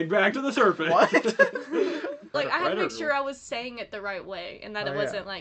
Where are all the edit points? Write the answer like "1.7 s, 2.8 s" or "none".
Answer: 2.3 s